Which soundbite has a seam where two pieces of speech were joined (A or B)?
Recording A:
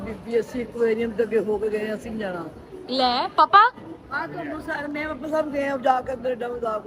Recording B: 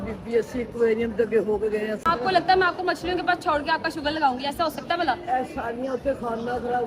B